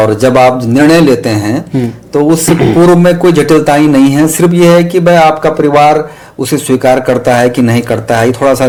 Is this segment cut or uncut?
uncut